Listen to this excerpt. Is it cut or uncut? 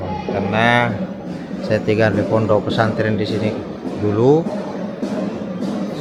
uncut